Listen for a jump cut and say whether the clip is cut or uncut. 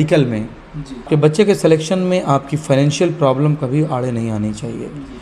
cut